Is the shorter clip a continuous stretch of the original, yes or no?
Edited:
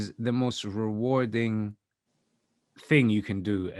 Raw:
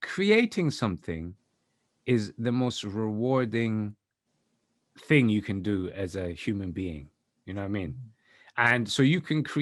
yes